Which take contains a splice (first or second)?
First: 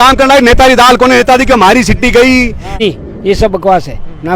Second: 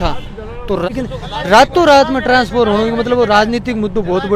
first